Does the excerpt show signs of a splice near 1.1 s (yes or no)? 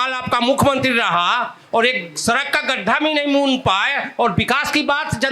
no